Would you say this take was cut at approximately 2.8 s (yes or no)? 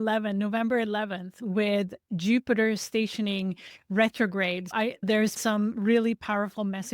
no